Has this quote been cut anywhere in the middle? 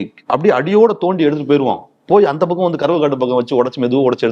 no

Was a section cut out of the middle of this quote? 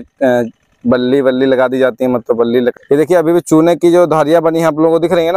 yes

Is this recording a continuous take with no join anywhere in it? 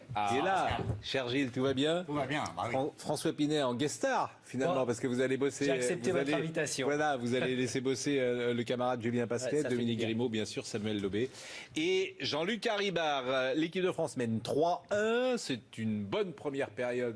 no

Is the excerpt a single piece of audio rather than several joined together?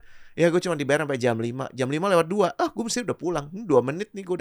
yes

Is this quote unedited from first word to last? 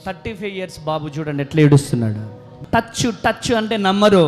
no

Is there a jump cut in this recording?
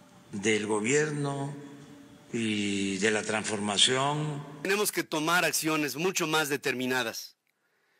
yes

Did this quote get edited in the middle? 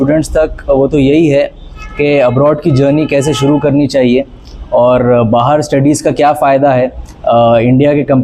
no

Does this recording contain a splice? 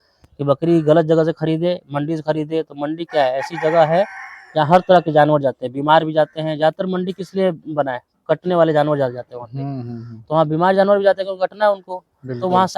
no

